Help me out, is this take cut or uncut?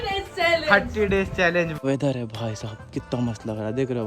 cut